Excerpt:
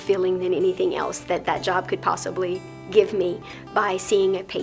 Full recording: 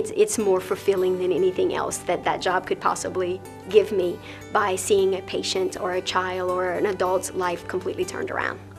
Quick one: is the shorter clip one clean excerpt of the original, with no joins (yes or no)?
yes